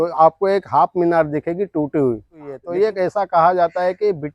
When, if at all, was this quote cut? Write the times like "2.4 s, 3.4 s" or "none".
2.6 s